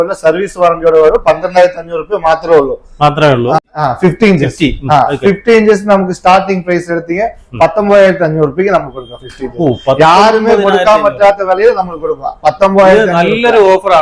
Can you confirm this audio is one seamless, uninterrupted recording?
no; 1 cut; at 3.6 s

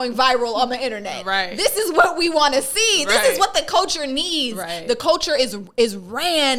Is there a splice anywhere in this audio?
no; 0 cuts

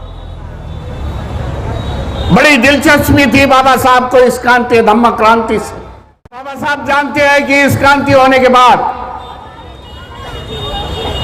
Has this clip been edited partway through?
yes; 1 cut; at 6.6 s

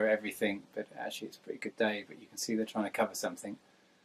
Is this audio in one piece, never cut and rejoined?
yes; 0 cuts

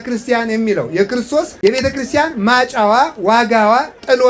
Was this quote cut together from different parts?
yes; 1 cut; at 1.5 s

